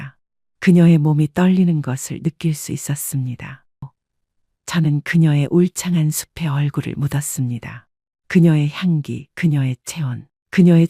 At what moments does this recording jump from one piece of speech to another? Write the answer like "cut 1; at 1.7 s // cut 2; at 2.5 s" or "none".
cut 1; at 3.9 s